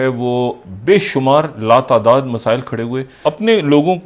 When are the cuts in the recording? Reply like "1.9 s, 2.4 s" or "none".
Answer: 3.1 s